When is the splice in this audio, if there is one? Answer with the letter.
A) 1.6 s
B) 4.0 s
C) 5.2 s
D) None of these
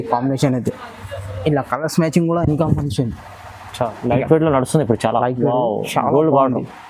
B